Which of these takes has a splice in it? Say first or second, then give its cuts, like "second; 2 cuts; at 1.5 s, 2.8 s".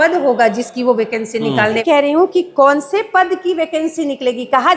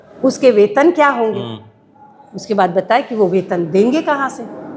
first; 1 cut; at 1.8 s